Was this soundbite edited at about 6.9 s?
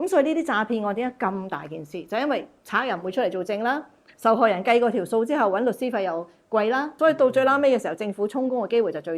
yes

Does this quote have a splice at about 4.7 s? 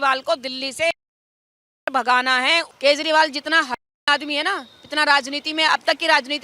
no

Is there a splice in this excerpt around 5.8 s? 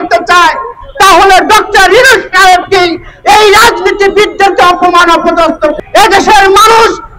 yes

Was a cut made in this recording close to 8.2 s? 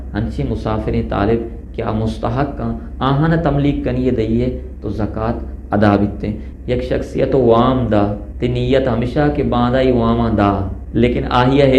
yes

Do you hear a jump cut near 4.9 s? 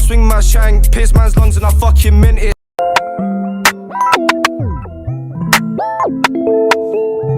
no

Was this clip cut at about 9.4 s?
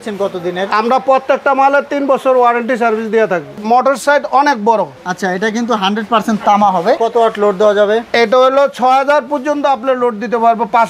no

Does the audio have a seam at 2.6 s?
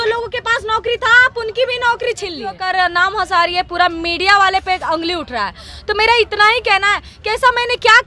yes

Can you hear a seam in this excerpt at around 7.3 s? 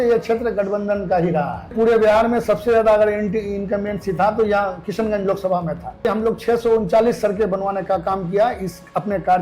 no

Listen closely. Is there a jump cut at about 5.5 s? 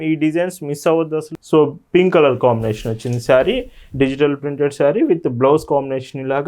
no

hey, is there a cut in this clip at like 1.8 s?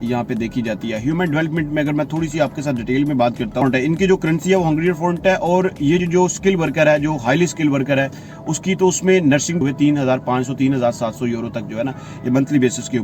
no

